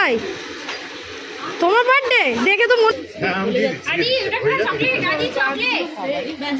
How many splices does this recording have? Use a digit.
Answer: 1